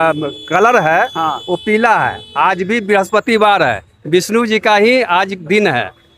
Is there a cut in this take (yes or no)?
no